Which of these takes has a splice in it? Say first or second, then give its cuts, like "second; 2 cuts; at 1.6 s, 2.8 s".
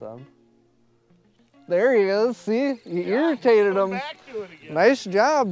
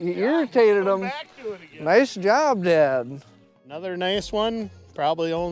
second; 1 cut; at 3.8 s